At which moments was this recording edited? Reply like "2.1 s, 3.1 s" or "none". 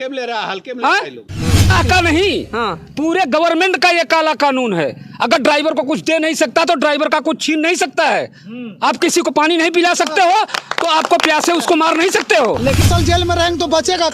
1.7 s, 12.9 s